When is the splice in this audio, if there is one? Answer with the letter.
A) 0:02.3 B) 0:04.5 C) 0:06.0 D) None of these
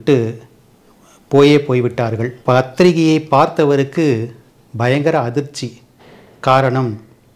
A